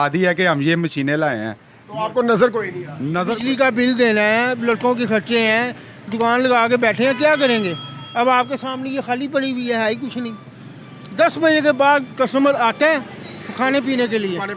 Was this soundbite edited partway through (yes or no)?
yes